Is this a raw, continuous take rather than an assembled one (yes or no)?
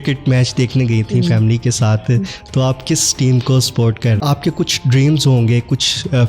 no